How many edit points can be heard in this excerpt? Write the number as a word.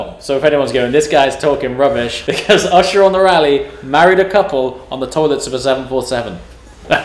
one